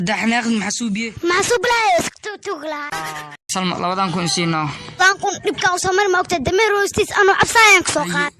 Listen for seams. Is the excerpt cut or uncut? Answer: cut